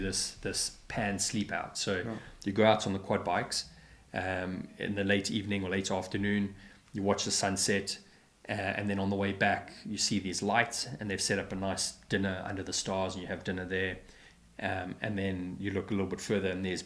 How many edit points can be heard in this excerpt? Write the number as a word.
zero